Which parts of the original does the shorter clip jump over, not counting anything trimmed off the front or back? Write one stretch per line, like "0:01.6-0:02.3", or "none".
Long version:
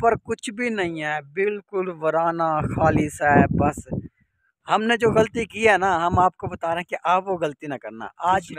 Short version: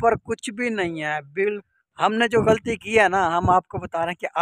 0:01.6-0:04.3